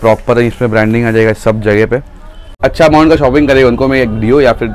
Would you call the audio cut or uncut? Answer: cut